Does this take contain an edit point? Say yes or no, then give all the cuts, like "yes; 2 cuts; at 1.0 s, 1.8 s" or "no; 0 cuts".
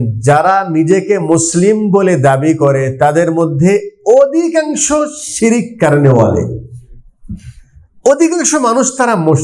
no; 0 cuts